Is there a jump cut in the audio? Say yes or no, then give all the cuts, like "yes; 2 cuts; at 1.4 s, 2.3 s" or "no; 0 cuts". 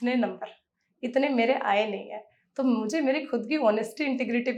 no; 0 cuts